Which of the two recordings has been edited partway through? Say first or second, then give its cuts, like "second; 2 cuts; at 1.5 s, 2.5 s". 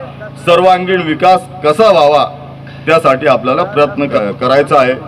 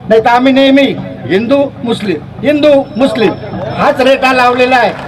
first; 1 cut; at 4.1 s